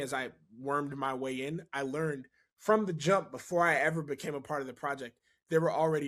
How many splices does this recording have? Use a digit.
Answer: 0